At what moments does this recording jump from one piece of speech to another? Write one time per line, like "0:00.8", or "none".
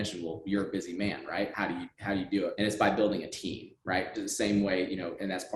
0:01.5
0:02.5